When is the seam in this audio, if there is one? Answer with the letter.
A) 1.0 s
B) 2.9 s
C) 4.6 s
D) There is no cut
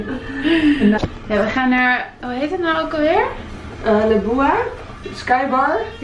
A